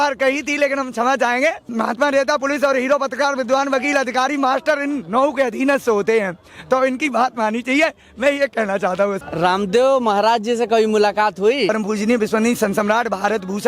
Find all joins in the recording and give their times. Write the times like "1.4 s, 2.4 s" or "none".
1.7 s, 9.2 s, 11.7 s